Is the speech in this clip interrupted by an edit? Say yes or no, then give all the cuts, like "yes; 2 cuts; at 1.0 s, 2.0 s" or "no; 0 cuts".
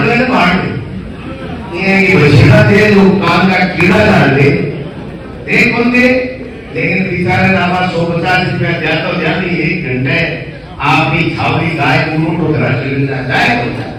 no; 0 cuts